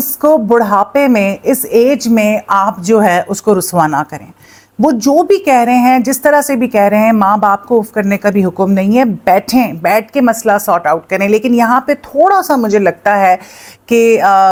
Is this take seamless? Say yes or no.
yes